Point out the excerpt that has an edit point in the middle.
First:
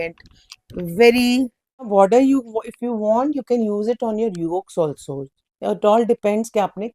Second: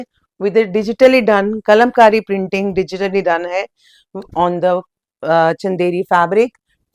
first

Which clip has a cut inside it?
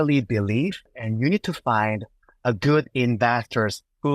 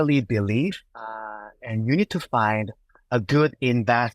first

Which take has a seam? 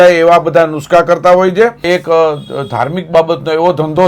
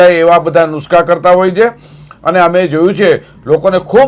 first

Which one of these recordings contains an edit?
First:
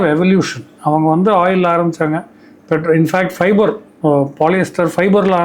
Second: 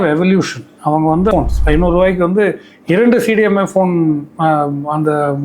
second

